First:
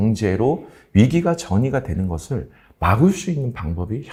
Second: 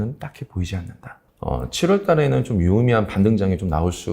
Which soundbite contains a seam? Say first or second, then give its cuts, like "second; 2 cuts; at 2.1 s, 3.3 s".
second; 1 cut; at 1.2 s